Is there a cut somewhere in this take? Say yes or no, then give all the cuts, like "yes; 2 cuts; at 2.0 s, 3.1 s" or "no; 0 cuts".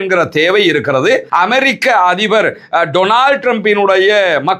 yes; 1 cut; at 1.3 s